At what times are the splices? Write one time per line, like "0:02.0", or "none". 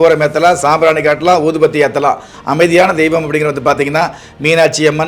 0:02.4